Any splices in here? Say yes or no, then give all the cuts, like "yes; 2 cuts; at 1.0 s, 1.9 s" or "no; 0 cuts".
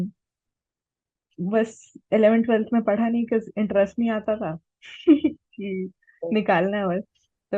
no; 0 cuts